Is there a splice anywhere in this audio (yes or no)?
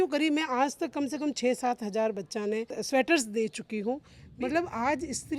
yes